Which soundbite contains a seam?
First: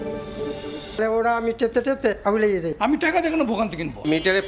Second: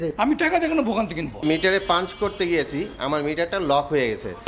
first; 1 cut; at 1.0 s

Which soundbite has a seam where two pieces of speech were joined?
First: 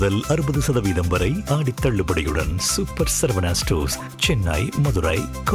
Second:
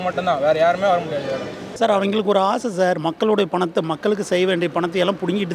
second; 1 cut; at 1.6 s

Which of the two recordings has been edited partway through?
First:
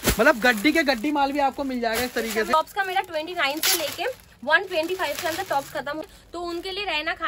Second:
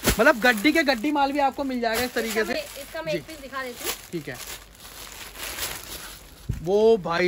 first; 2 cuts; at 2.5 s, 6.0 s

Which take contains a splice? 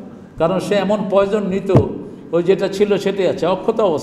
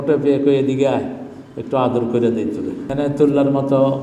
second; 1 cut; at 2.8 s

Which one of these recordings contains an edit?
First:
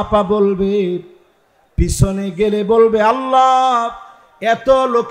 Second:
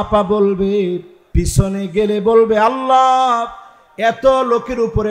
second; 1 cut; at 1.2 s

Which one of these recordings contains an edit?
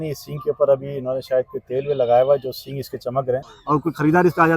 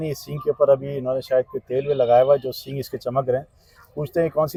first; 1 cut; at 3.5 s

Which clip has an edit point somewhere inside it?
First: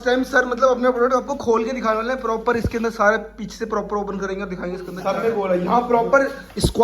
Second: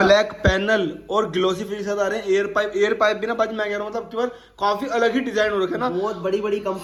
first; 1 cut; at 4.9 s

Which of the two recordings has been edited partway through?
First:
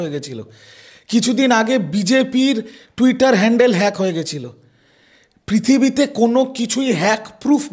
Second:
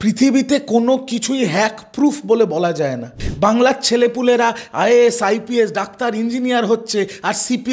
second; 1 cut; at 3.2 s

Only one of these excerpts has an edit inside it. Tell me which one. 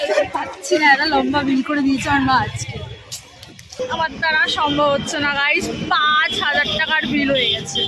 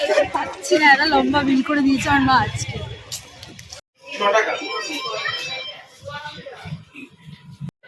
first; 1 cut; at 3.6 s

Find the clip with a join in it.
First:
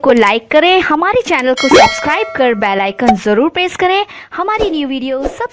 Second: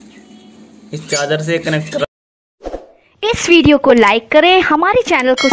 second; 1 cut; at 2.0 s

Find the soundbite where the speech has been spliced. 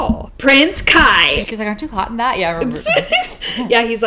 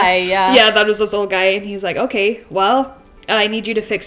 first; 1 cut; at 1.4 s

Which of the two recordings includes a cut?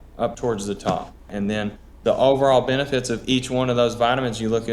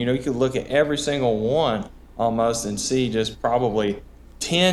first; 1 cut; at 1.3 s

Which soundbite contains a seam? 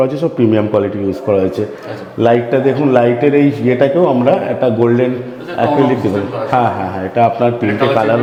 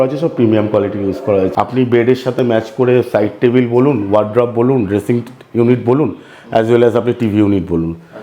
second; 1 cut; at 1.5 s

